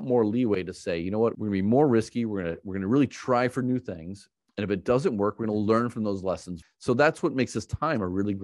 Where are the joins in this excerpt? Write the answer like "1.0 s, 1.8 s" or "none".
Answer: 1.4 s, 6.6 s